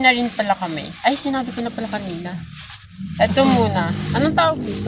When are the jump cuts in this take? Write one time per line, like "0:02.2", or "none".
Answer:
none